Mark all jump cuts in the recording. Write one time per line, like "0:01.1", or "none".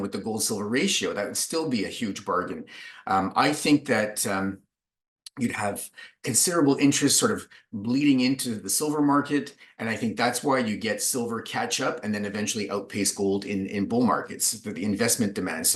none